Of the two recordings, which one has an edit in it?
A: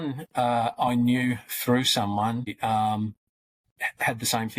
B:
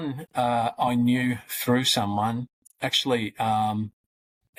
A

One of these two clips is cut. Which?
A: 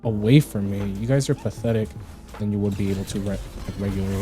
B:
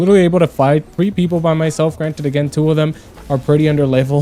A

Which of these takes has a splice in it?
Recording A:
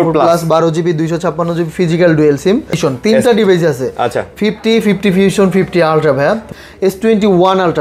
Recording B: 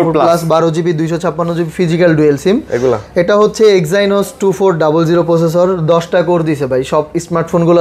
A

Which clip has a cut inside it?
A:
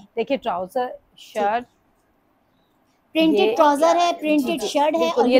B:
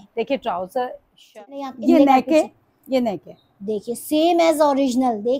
B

